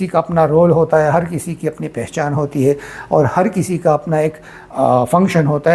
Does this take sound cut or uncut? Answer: uncut